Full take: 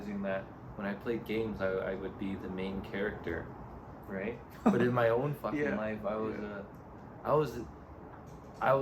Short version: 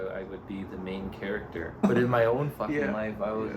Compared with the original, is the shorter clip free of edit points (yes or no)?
no